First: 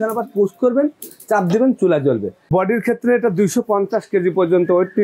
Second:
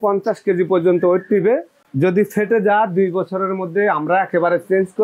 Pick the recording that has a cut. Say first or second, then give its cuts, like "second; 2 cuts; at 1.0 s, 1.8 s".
first; 1 cut; at 2.5 s